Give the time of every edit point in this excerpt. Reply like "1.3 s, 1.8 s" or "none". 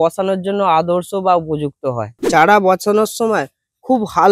2.2 s